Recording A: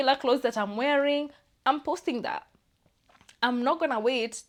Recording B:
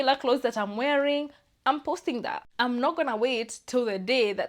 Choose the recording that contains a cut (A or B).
B